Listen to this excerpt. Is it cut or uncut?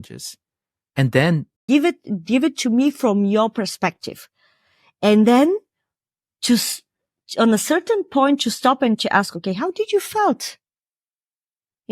cut